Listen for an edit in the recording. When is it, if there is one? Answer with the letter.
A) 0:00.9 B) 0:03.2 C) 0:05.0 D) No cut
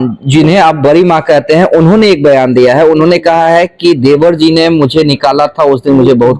D